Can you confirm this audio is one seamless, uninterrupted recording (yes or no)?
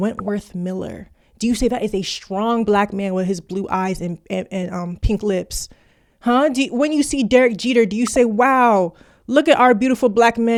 yes